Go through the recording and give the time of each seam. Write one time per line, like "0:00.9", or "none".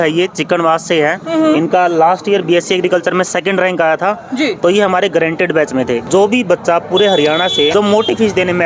0:06.0
0:07.7

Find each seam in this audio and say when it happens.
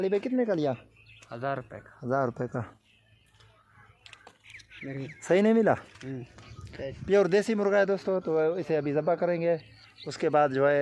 none

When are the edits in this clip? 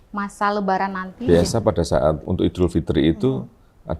0:01.1
0:02.2

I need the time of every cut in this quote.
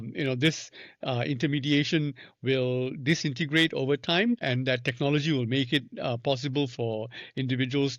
none

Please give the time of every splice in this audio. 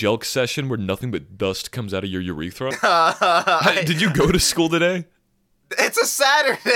0:02.8

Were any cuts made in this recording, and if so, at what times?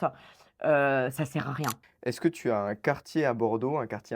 0:01.8

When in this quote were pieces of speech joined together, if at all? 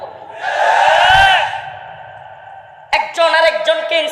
0:03.1

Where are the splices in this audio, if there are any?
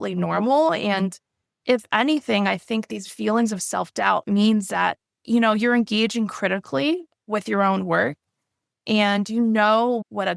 none

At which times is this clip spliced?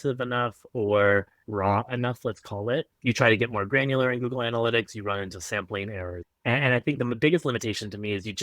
0:01.4
0:02.9
0:06.2

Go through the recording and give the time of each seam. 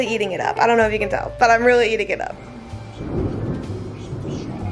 0:02.4

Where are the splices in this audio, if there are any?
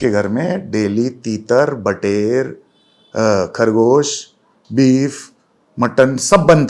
none

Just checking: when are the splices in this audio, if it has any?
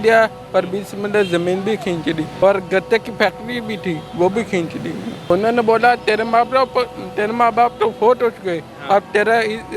0:02.3
0:05.3

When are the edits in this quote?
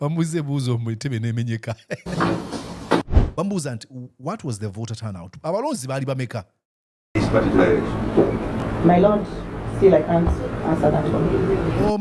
0:03.1

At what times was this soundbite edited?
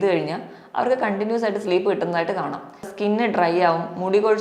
0:02.9

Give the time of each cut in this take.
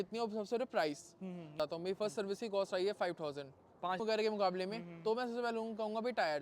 0:01.5
0:04.0

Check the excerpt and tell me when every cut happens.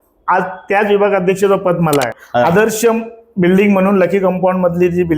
0:02.2

